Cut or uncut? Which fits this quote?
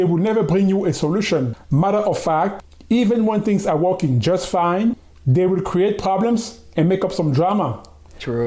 uncut